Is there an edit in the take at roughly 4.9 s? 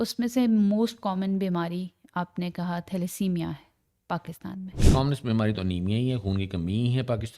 yes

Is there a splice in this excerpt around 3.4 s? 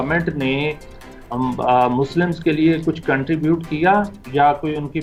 no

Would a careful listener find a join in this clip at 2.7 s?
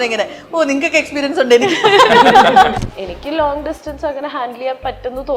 yes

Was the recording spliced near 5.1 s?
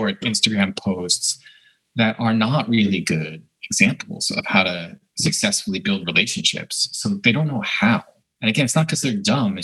no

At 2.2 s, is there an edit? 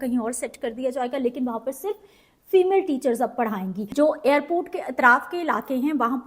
no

